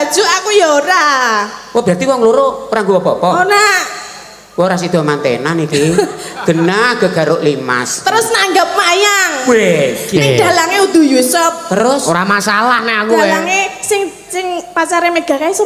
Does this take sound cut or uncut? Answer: uncut